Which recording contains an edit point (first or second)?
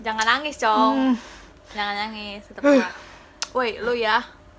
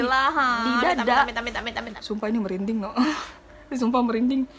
second